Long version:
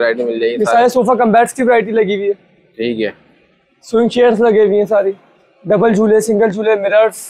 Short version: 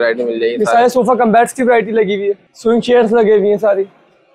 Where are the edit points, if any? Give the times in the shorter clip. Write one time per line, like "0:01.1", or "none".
0:02.5

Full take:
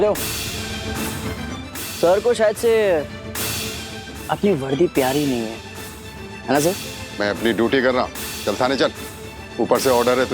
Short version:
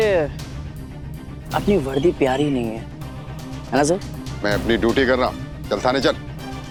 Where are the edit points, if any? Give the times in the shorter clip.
none

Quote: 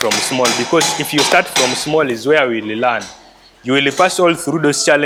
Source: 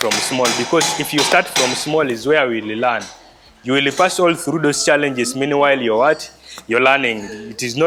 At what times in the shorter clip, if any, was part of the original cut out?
none

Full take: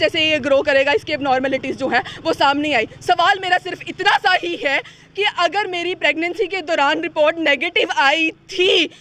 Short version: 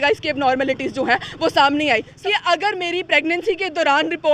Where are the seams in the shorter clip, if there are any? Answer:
0:02.1

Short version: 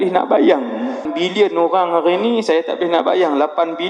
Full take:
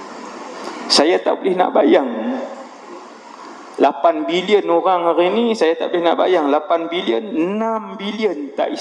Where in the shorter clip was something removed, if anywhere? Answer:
0:01.1

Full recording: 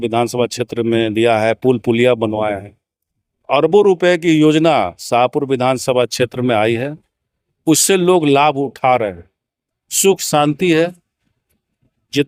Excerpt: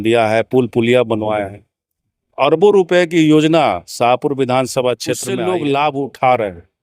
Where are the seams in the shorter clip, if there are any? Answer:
0:05.3

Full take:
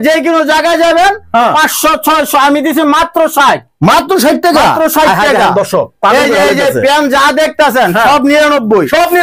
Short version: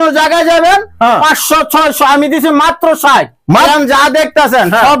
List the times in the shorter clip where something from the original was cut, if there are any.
0:03.7

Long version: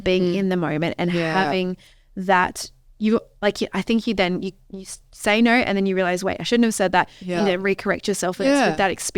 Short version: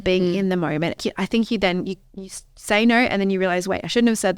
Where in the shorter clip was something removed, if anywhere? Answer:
0:01.0

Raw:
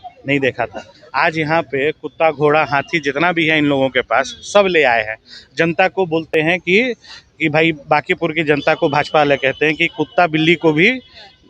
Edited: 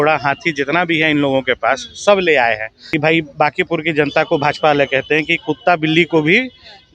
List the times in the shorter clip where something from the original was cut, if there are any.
0:02.7

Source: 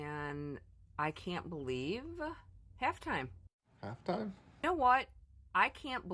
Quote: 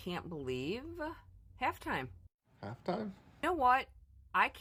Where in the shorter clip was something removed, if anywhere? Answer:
none

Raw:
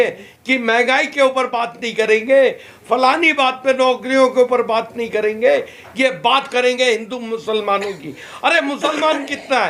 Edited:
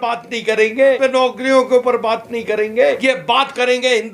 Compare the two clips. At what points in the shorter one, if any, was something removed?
0:01.0
0:03.0

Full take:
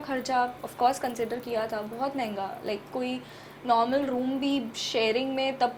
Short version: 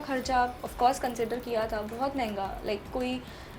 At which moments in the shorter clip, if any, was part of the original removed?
none

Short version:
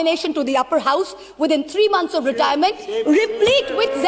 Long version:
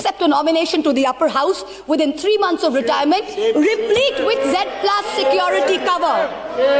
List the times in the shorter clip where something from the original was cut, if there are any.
none

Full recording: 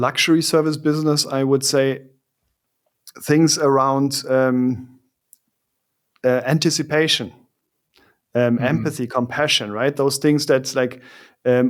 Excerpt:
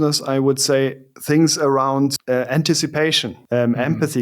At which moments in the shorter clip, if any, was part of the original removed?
0:01.1
0:02.2
0:03.3

